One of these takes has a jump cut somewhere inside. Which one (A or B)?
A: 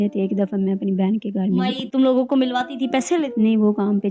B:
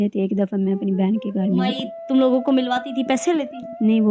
A